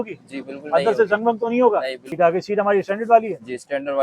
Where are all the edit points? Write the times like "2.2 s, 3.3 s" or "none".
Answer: 2.0 s